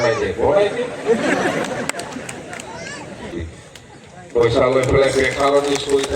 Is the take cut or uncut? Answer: cut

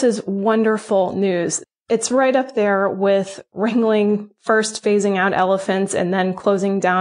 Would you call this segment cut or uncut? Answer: cut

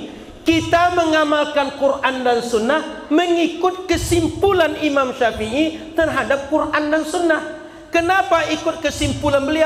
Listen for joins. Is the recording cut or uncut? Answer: uncut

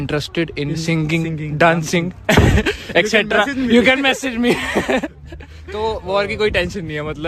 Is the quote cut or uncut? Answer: uncut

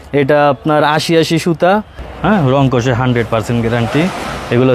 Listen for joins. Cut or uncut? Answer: cut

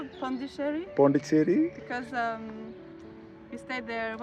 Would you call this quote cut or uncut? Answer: uncut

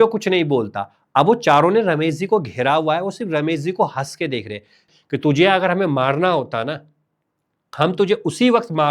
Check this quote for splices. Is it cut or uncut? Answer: cut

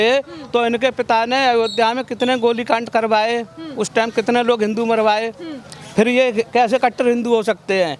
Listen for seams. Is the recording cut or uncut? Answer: uncut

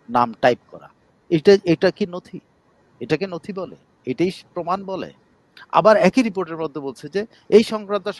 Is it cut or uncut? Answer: uncut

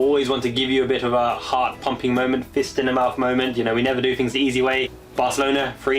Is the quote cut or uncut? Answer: cut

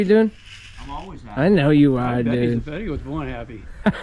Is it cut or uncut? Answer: uncut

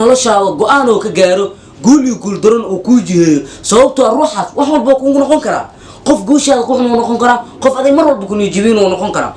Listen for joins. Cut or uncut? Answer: uncut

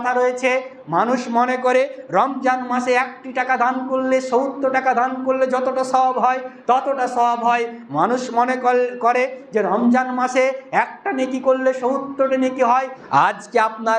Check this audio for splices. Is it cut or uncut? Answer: cut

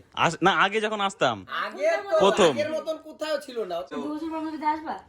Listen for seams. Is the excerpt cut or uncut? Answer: cut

